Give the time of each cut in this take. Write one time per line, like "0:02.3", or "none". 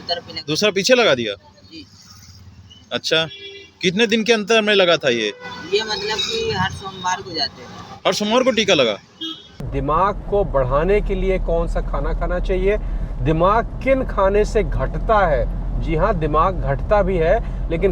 0:09.7